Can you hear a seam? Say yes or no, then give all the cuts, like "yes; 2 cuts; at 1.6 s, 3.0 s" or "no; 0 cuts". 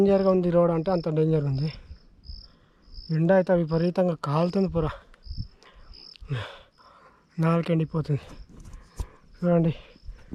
no; 0 cuts